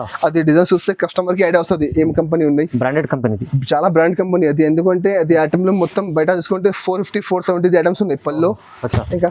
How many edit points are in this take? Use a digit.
0